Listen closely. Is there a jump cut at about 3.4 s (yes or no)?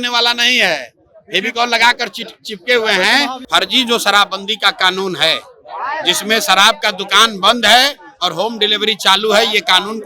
yes